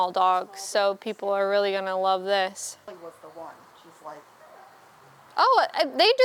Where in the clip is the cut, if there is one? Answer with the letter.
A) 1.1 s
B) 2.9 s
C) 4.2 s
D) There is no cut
B